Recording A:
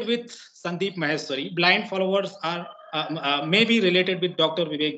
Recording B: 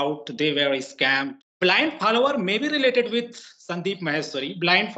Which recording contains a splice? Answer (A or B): B